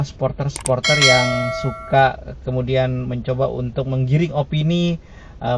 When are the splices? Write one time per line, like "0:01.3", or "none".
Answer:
none